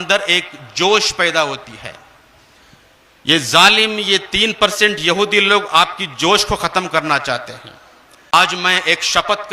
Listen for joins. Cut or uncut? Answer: cut